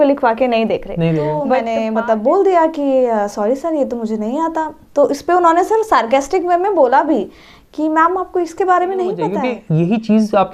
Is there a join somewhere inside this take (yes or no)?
yes